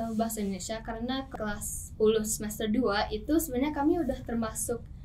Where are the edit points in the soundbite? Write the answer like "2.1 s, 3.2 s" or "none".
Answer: 1.3 s

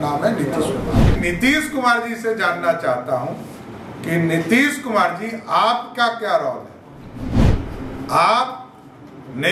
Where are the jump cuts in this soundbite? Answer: 1.2 s

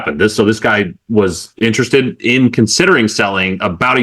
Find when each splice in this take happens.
none

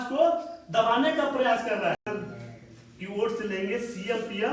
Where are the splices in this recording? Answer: 2.0 s

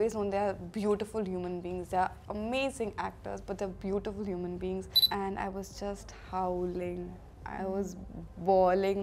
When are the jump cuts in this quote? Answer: 5.1 s

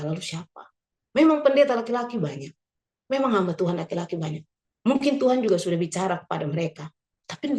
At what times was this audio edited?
0.9 s

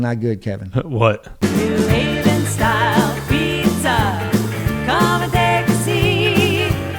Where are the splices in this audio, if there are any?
1.3 s

